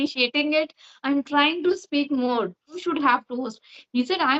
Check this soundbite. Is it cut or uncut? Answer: cut